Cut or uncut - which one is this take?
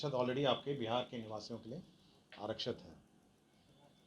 uncut